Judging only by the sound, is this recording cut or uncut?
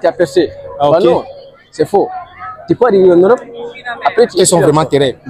cut